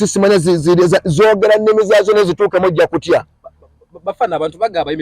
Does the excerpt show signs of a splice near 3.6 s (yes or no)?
no